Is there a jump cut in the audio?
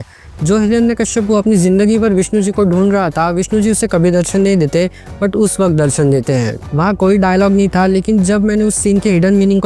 yes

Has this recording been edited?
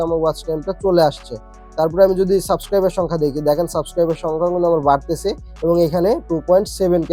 no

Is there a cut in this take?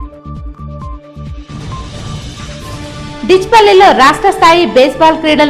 no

